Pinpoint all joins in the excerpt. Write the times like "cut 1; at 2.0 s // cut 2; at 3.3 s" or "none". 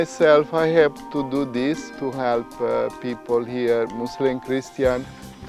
cut 1; at 2.0 s